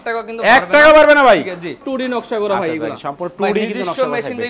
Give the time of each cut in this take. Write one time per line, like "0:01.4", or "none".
0:01.8